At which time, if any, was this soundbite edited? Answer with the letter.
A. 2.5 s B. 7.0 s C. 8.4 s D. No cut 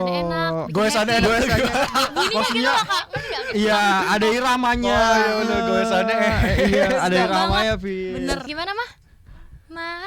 C